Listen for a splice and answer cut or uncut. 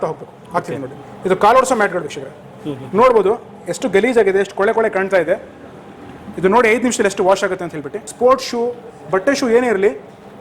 cut